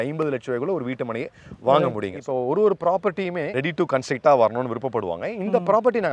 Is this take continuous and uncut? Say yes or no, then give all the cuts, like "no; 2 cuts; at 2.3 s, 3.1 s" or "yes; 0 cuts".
no; 2 cuts; at 2.2 s, 3.5 s